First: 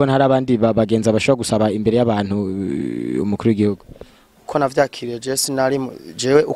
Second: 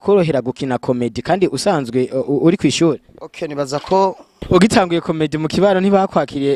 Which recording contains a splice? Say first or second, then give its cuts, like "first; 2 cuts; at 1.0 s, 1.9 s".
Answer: second; 1 cut; at 4.4 s